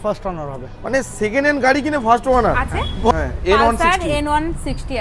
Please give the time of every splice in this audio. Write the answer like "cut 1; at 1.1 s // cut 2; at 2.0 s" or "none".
cut 1; at 3.1 s